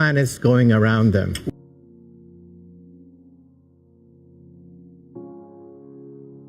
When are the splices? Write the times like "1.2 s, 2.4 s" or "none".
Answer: 1.5 s

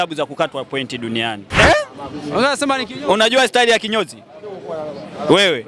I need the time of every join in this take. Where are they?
1.5 s

